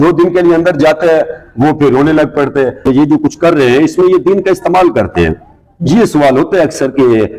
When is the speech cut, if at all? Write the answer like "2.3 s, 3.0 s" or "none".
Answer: 2.8 s